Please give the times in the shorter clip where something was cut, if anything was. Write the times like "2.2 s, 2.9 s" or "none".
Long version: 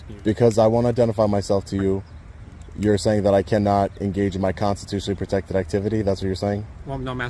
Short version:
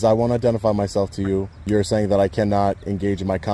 1.5 s